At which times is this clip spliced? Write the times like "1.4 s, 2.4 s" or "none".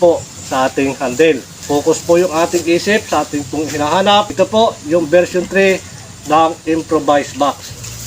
1.5 s, 4.3 s